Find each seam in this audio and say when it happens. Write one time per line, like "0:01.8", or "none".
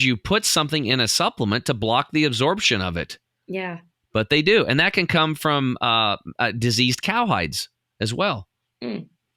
none